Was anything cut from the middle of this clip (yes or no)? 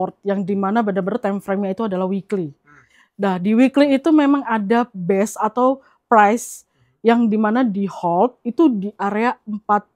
no